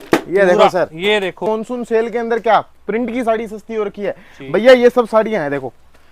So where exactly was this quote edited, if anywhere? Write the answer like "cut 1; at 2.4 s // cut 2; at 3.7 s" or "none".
cut 1; at 1.4 s